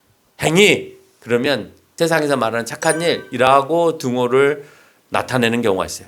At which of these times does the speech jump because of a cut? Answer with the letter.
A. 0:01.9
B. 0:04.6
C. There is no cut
A